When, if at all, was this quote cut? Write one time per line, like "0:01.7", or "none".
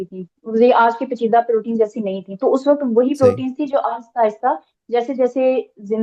none